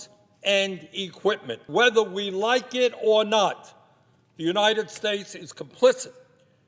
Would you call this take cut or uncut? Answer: cut